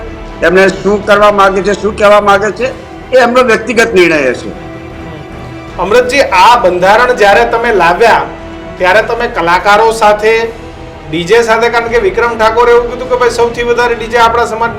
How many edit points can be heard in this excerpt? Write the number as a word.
zero